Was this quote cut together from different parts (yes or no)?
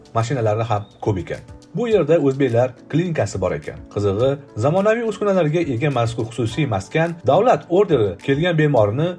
yes